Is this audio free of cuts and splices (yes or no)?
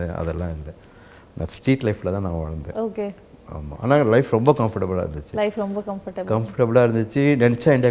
yes